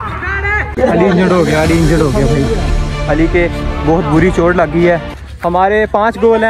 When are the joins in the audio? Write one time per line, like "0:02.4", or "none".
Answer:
none

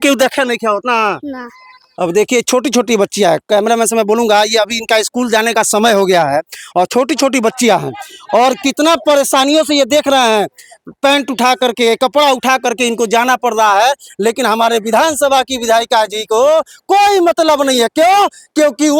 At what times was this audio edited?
none

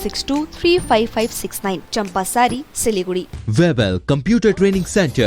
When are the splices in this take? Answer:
0:03.4

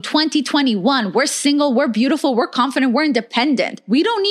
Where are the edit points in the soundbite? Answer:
none

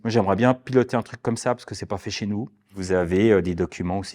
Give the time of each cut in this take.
0:02.7

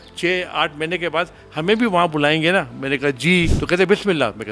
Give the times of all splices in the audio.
0:03.6

